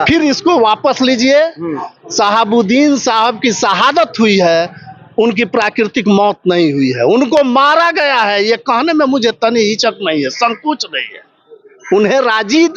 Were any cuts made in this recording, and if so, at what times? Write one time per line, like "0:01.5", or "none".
none